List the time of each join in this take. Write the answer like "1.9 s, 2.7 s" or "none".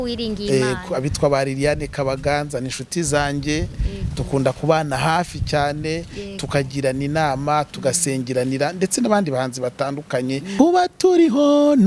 10.6 s

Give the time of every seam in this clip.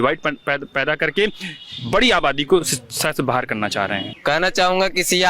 none

